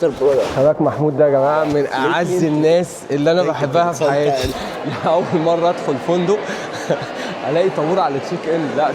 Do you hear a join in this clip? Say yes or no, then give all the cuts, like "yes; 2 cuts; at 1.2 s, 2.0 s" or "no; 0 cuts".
yes; 1 cut; at 4.5 s